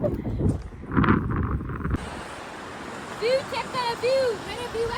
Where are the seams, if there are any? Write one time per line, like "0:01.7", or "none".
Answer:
0:02.1